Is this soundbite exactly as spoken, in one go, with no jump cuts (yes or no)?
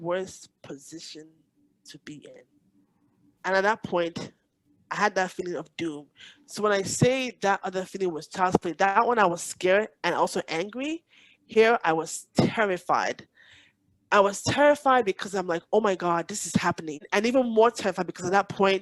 no